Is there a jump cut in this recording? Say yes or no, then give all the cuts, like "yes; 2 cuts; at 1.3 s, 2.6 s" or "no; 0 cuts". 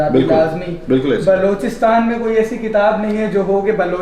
no; 0 cuts